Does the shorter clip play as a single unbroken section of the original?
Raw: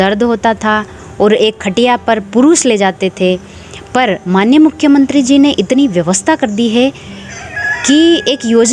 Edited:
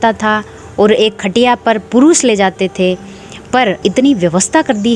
no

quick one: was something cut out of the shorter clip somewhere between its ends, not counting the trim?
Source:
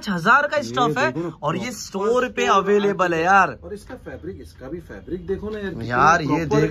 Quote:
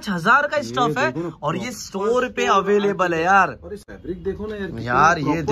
yes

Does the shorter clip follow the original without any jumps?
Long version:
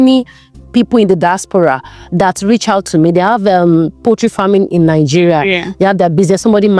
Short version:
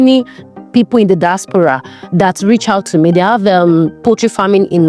yes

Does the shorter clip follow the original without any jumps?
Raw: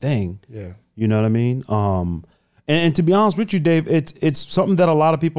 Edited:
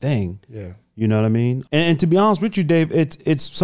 no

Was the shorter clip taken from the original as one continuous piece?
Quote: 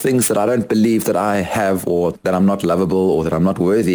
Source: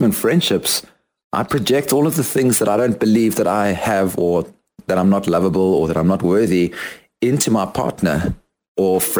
no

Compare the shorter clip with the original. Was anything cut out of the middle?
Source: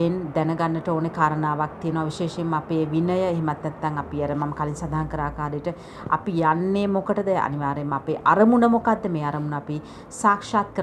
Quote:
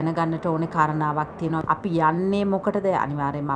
yes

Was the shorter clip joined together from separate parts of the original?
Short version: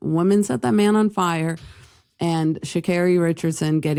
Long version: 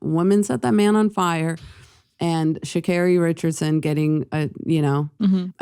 no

